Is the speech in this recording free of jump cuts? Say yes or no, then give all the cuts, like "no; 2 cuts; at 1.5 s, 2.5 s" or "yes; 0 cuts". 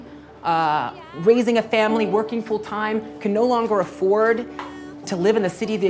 yes; 0 cuts